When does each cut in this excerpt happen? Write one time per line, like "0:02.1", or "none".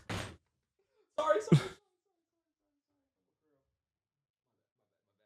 none